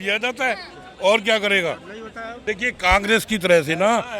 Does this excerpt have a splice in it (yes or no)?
yes